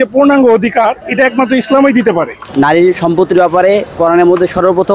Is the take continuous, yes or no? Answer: no